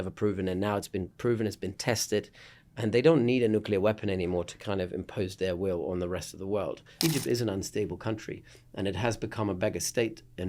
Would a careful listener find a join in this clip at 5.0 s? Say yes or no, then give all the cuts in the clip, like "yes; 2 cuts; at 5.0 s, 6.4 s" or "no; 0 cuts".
no; 1 cut; at 6.8 s